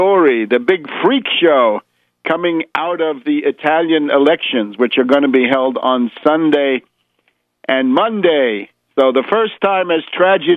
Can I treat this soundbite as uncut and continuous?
yes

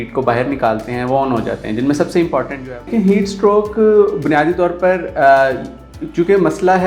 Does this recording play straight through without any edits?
no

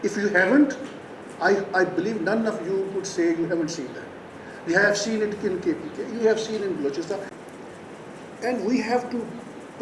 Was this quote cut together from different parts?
yes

